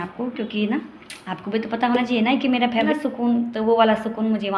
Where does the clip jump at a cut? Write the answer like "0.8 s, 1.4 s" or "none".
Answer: 2.9 s